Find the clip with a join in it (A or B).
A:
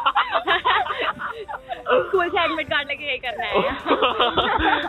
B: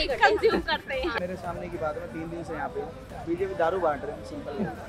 B